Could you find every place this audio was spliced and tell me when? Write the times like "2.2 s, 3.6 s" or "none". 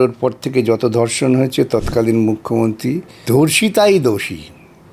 3.1 s